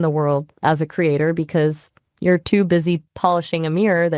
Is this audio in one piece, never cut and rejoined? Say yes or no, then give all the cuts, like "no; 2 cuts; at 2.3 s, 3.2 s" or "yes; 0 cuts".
yes; 0 cuts